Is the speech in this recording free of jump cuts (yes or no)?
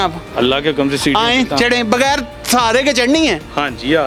yes